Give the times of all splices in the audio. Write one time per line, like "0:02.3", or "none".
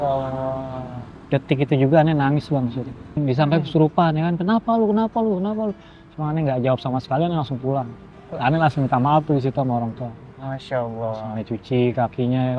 0:03.2